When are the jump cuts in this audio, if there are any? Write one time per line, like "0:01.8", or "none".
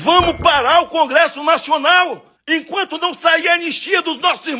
0:02.3